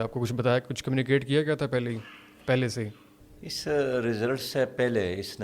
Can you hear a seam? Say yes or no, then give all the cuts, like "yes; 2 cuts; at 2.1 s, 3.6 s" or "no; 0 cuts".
no; 0 cuts